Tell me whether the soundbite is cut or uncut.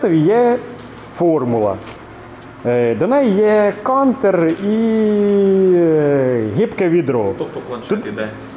uncut